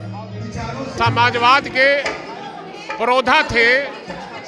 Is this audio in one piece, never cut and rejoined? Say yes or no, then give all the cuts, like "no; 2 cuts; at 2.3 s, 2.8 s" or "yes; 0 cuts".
no; 1 cut; at 0.9 s